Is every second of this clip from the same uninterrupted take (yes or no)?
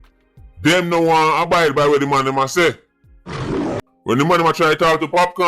no